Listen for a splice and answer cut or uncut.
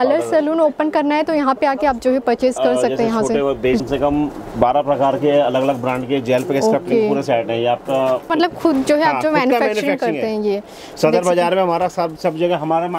cut